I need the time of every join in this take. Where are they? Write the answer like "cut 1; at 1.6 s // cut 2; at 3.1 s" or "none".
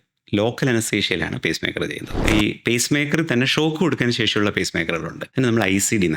cut 1; at 2.2 s // cut 2; at 5.2 s